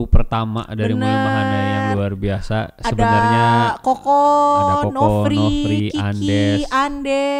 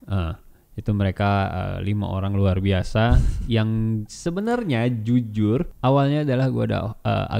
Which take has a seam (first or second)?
second